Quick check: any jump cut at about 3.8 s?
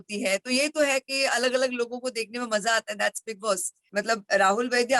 yes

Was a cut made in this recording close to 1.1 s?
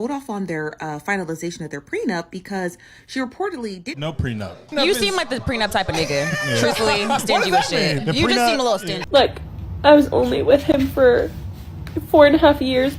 no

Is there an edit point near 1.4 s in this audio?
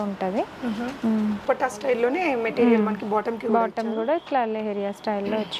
yes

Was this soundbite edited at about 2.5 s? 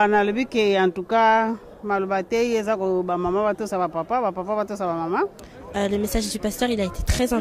no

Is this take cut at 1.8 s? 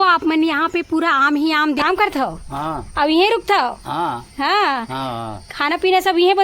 yes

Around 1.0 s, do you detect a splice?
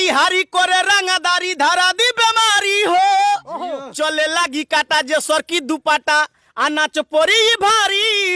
no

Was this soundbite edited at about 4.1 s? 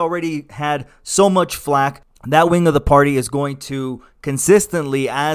no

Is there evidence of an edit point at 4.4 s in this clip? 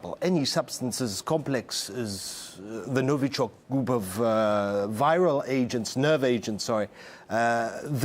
no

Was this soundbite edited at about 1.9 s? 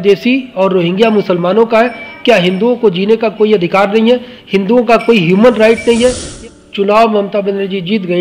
no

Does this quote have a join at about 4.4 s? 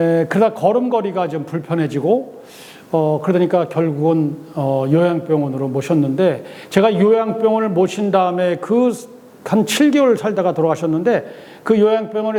no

